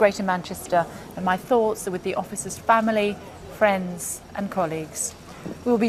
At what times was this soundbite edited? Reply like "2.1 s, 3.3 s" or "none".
none

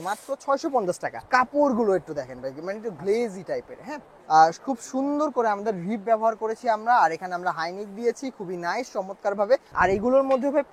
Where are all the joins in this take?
1.1 s, 4.1 s, 9.7 s

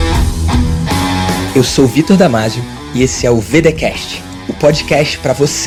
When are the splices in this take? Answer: none

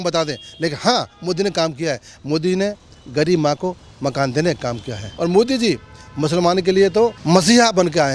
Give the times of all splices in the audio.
5.1 s, 7.2 s

